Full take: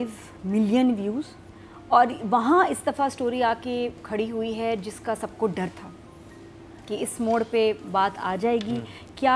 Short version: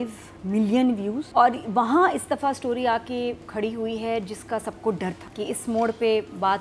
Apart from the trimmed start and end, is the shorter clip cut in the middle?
yes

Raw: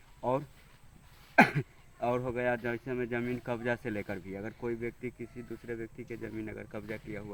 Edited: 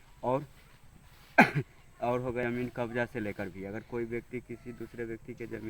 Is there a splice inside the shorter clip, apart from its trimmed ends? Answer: yes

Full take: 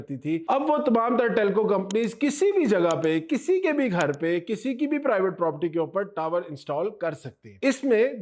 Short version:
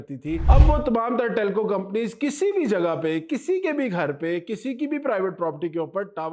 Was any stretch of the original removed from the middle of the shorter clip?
no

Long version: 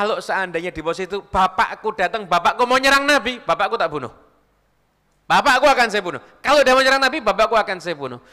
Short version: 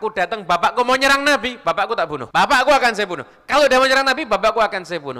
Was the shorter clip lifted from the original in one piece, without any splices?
no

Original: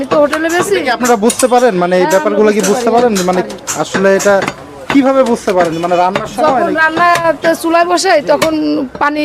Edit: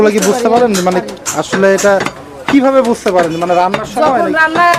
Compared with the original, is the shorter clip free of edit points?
yes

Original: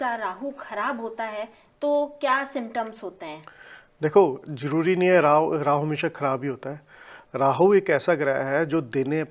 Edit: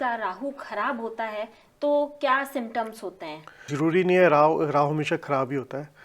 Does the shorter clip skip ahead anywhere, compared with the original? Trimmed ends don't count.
yes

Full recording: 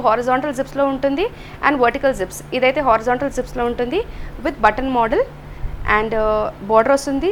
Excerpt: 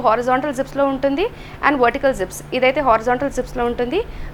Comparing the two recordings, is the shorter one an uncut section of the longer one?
yes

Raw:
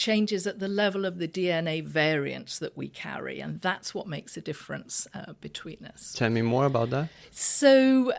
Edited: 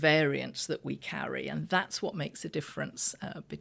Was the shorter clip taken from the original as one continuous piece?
yes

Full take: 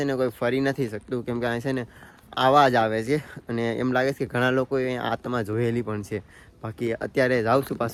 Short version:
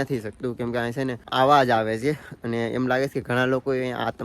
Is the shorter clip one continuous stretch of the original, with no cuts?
no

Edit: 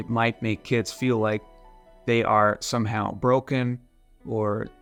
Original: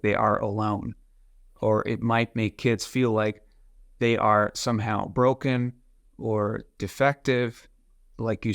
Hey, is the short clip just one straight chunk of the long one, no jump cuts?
yes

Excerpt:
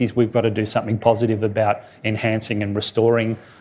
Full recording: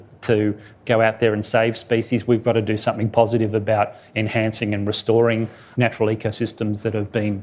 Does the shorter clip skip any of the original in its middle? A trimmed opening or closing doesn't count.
no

